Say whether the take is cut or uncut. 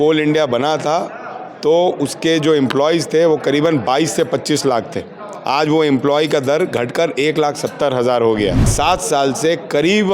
cut